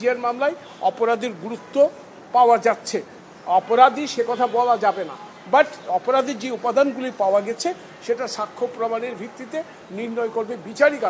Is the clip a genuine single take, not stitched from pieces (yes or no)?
yes